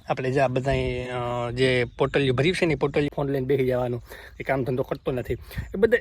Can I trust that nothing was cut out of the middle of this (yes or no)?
no